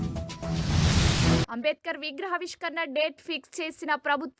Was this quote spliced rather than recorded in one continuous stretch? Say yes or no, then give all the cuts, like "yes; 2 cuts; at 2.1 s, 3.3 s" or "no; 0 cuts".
yes; 1 cut; at 1.5 s